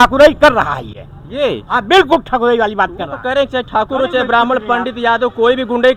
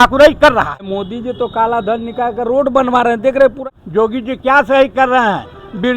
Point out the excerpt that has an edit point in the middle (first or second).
second